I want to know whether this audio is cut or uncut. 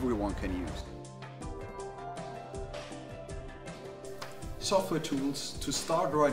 uncut